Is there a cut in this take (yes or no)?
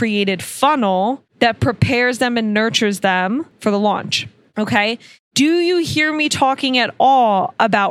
yes